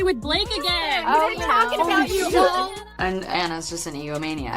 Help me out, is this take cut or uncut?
cut